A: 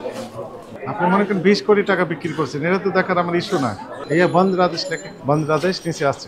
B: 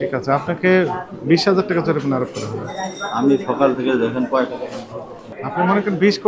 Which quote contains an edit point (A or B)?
A